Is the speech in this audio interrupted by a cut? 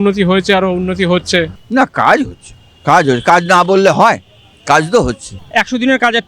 yes; 2 cuts; at 1.6 s, 5.3 s

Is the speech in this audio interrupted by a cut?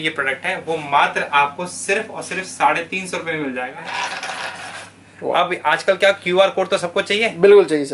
yes; 1 cut; at 3.8 s

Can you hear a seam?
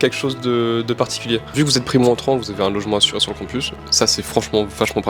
yes; 1 cut; at 1.5 s

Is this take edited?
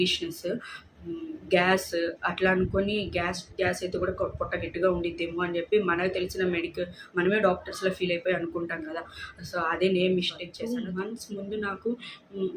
yes; 1 cut; at 10.5 s

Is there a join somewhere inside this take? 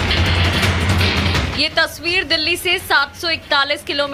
no; 0 cuts

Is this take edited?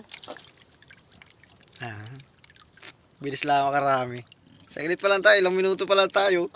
no; 0 cuts

